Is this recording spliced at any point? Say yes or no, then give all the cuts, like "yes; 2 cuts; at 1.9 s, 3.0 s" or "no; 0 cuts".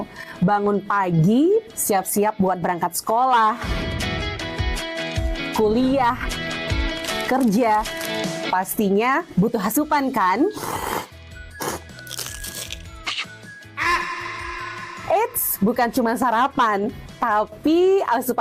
yes; 1 cut; at 2.0 s